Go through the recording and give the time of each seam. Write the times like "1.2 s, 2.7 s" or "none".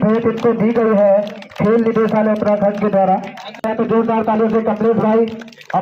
3.6 s